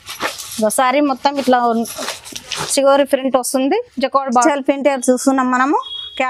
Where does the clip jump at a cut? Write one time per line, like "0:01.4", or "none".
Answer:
0:04.4